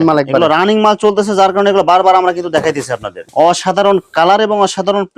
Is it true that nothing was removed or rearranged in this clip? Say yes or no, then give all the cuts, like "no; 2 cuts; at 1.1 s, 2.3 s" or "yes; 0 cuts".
no; 1 cut; at 3.1 s